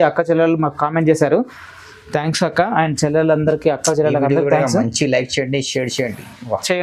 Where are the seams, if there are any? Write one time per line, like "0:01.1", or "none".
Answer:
none